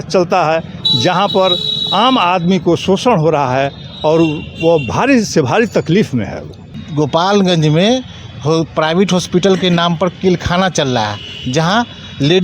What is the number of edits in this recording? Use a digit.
1